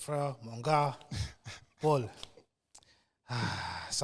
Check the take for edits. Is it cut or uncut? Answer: uncut